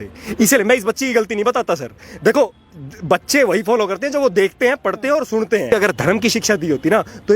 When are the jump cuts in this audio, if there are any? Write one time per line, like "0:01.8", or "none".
0:05.7